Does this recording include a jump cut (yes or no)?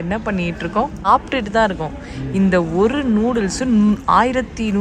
yes